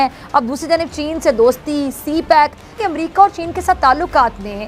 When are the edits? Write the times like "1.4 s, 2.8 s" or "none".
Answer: 2.8 s